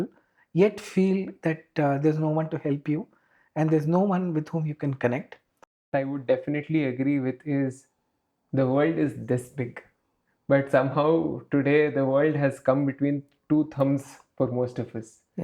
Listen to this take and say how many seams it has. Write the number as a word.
one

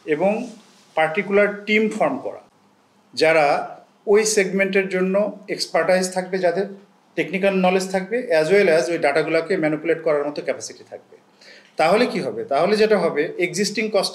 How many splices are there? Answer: zero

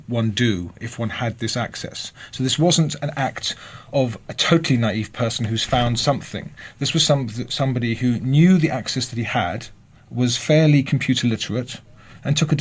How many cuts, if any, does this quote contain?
one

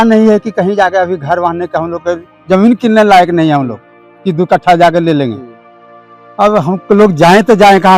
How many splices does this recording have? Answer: zero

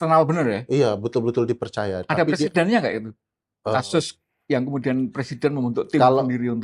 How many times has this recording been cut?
zero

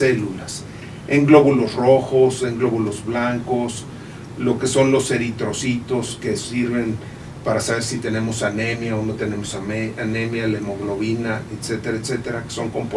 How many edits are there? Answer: zero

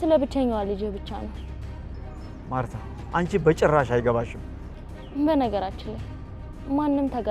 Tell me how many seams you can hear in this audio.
zero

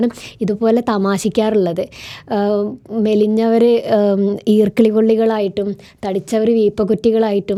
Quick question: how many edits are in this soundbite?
zero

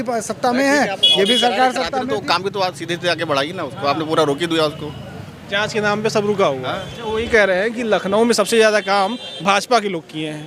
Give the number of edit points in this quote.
one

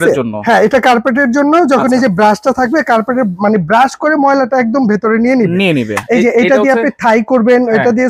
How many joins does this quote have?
one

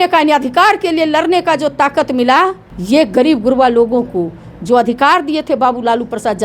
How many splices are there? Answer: one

